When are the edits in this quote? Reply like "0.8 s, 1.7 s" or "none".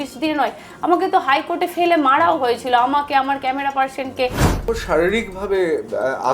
4.6 s